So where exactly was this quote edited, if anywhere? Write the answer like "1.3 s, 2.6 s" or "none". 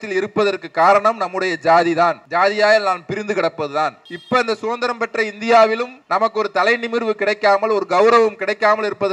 2.2 s, 4.1 s, 6.0 s